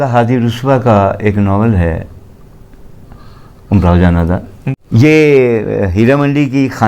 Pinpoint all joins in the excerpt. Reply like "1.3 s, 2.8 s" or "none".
4.6 s